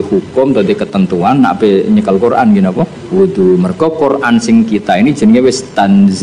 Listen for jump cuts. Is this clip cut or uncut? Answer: uncut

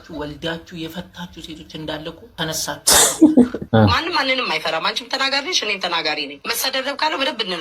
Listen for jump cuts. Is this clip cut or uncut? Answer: cut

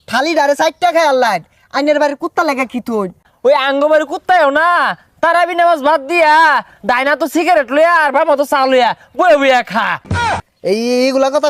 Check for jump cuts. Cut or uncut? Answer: cut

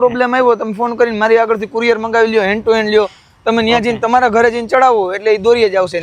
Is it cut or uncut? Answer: uncut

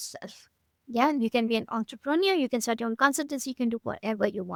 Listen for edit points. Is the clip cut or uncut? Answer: uncut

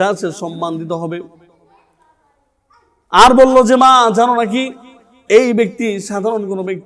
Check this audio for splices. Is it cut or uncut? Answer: uncut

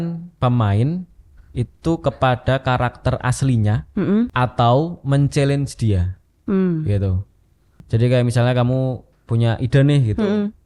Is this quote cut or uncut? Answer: cut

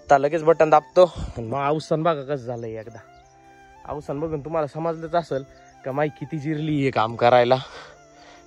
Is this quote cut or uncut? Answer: uncut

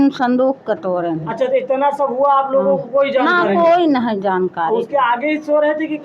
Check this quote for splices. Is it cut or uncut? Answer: uncut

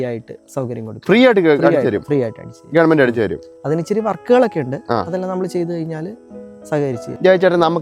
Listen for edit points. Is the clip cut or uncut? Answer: uncut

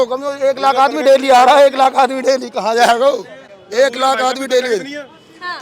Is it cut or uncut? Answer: uncut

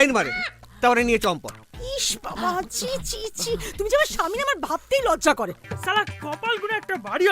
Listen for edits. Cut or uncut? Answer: cut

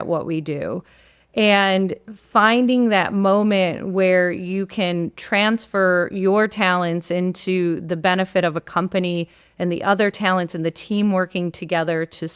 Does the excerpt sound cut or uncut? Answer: uncut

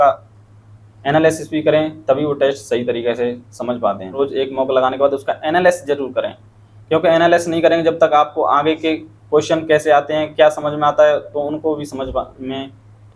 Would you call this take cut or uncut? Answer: cut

